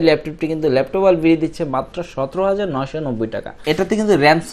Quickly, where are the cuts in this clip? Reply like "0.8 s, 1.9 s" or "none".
3.6 s